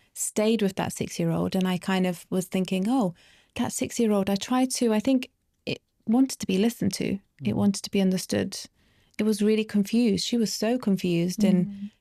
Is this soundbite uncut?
yes; 0 cuts

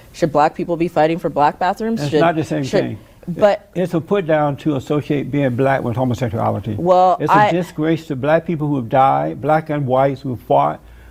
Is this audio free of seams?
yes; 0 cuts

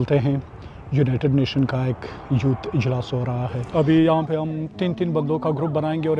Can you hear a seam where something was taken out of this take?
yes; 2 cuts; at 3.6 s, 4.7 s

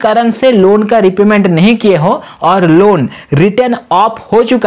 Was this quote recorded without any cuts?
yes; 0 cuts

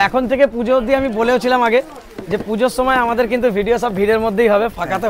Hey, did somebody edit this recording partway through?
no; 0 cuts

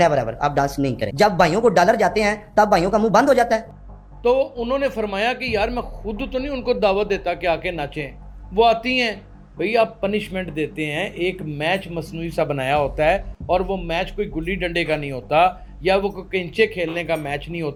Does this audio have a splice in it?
no; 0 cuts

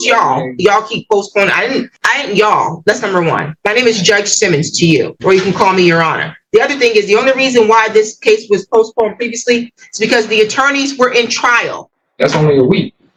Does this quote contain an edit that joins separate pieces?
no; 0 cuts

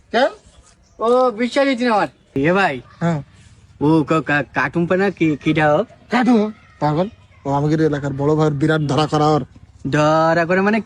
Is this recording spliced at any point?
yes; 1 cut; at 2.4 s

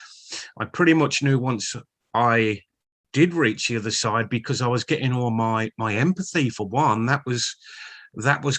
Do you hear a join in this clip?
no; 0 cuts

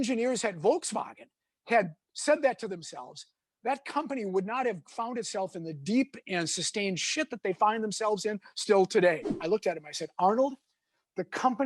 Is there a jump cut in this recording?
yes; 1 cut; at 9.3 s

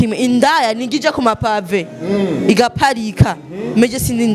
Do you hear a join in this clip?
no; 0 cuts

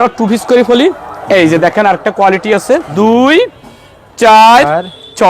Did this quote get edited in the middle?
yes; 1 cut; at 2.9 s

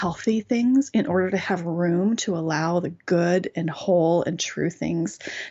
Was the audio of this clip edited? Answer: no; 0 cuts

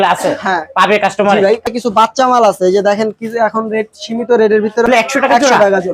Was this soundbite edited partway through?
yes; 2 cuts; at 2.1 s, 5.0 s

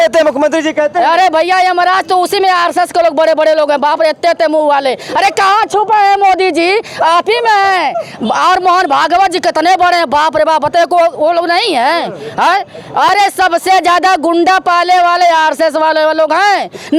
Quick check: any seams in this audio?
no; 0 cuts

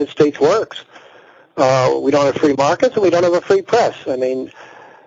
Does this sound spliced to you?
no; 0 cuts

